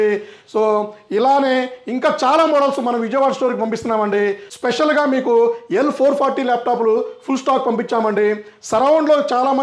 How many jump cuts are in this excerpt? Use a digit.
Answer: 1